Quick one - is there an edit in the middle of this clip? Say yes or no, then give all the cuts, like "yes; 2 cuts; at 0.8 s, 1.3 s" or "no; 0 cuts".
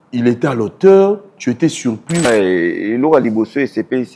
yes; 1 cut; at 2.2 s